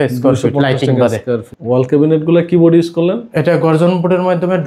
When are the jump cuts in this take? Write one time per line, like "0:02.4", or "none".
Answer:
0:01.5

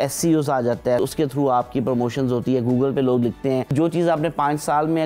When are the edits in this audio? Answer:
0:01.0
0:03.7

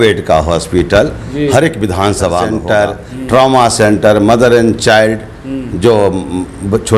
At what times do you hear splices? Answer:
0:02.5

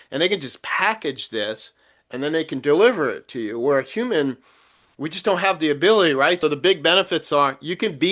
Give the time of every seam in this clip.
0:06.4

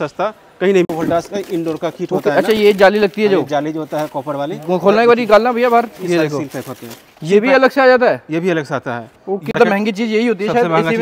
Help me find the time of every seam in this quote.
0:00.9
0:09.5

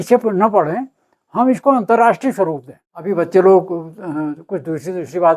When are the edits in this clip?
0:03.1

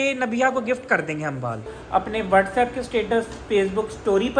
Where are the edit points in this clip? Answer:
0:01.8

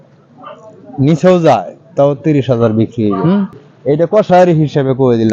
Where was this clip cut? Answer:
0:03.6

